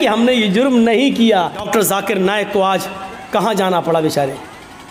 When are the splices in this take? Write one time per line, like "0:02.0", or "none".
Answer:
0:01.6

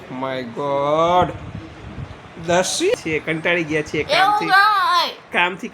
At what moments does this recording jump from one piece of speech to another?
0:03.0

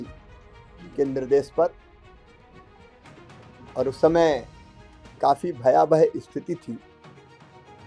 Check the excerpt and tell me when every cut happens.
0:02.3
0:03.7

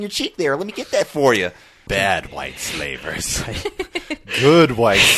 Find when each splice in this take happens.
0:01.8

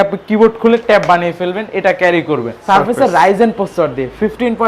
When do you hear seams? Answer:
0:02.6

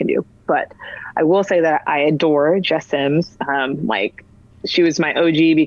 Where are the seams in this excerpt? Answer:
none

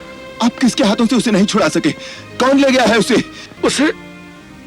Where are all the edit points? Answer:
0:03.4

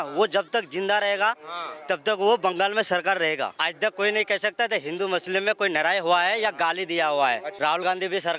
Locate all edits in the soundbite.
0:03.5
0:07.5

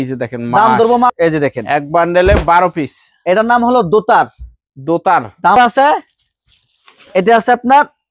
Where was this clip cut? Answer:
0:01.1
0:05.6

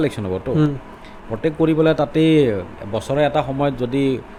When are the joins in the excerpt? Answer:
none

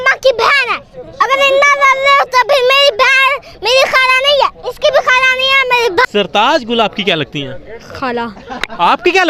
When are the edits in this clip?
0:01.2
0:06.1

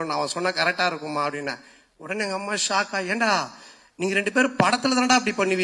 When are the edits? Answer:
none

